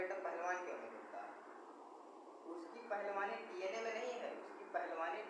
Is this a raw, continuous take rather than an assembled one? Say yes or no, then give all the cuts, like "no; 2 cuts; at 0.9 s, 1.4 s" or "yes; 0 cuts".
yes; 0 cuts